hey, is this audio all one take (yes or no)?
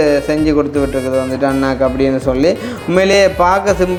yes